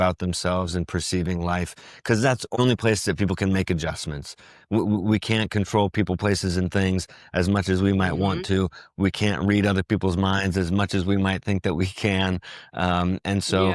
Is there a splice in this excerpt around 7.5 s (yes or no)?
no